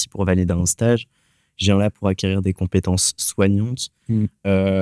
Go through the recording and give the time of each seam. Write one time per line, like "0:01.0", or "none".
none

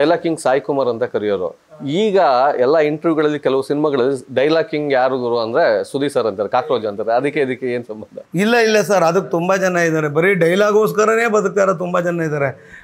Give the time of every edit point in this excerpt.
none

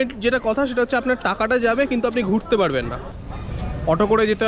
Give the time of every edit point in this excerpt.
0:03.4

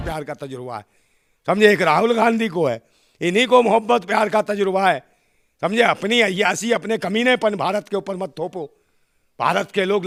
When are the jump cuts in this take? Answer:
none

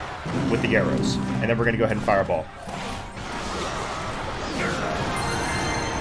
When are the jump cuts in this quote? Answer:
0:03.2

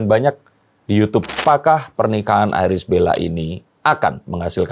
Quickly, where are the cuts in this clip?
0:01.3

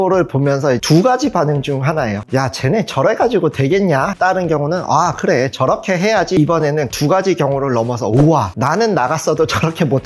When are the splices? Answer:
0:04.1
0:06.4

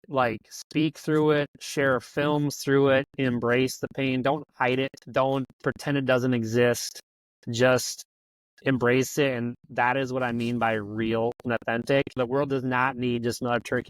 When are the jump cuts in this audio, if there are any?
0:12.2

